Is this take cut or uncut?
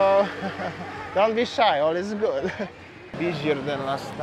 cut